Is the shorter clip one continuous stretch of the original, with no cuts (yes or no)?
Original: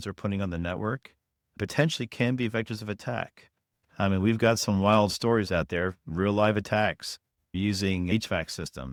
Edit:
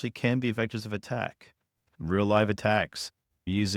no